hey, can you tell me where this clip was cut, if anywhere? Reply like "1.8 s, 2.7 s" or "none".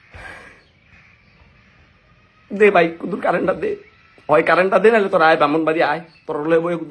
0.9 s